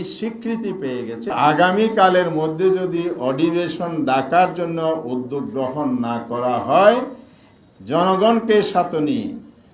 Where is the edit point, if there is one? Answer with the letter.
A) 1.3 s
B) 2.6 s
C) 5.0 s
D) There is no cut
A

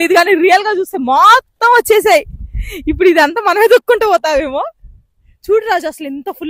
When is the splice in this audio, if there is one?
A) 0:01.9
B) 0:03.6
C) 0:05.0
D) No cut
D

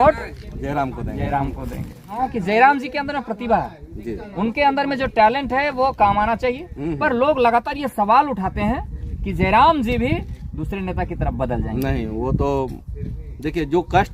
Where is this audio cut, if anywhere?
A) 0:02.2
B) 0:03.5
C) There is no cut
A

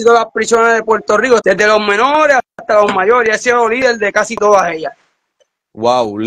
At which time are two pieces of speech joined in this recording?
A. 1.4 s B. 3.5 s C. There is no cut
A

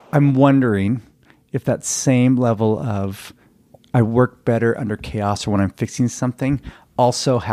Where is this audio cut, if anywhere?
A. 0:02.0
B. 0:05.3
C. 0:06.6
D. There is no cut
D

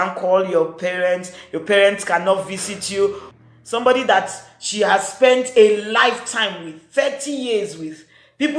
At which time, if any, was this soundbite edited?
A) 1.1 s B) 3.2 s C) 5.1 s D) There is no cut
B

